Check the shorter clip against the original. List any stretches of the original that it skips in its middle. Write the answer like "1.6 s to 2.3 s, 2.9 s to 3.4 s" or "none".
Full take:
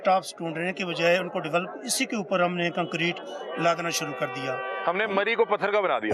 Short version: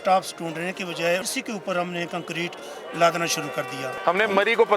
1.3 s to 1.9 s, 4.6 s to 4.8 s